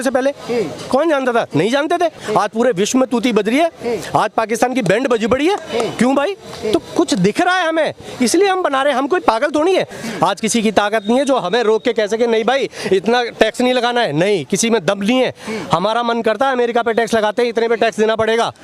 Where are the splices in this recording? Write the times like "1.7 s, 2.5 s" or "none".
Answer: 2.2 s, 10.0 s